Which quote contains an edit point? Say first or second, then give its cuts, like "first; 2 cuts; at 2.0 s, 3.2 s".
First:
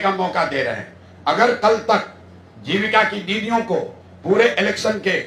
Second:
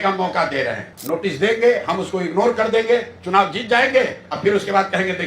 second; 1 cut; at 0.9 s